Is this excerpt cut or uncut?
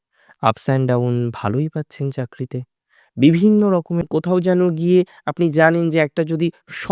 cut